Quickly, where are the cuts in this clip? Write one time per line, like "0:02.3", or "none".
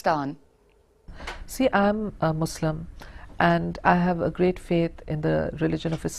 0:01.8